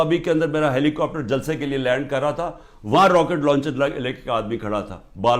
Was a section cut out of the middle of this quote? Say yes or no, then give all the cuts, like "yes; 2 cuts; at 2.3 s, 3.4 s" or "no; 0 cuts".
no; 0 cuts